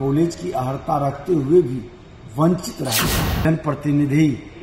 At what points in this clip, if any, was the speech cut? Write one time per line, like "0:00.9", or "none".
0:03.2